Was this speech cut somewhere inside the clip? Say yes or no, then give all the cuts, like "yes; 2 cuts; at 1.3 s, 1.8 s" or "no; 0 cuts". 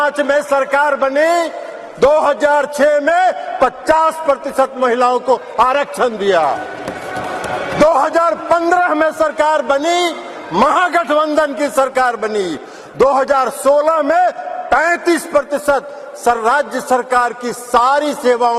no; 0 cuts